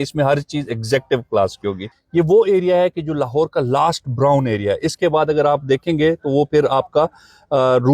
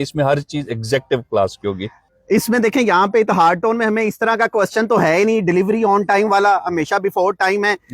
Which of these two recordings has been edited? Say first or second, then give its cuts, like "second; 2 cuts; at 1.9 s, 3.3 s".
first; 1 cut; at 1.9 s